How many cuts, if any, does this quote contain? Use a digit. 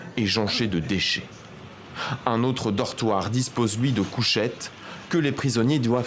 1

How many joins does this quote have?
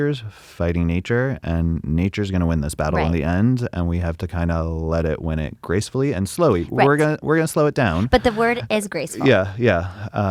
0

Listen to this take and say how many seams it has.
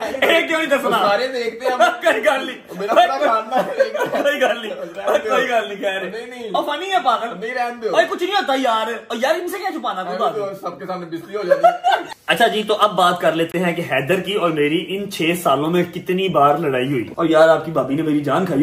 2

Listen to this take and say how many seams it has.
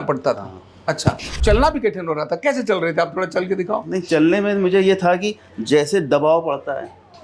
1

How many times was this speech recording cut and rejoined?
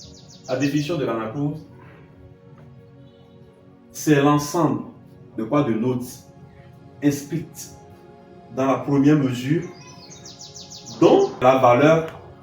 1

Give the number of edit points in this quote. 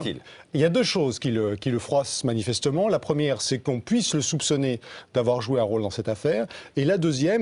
1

